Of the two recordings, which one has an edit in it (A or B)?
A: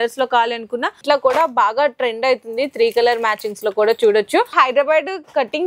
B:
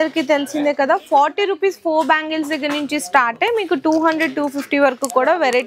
A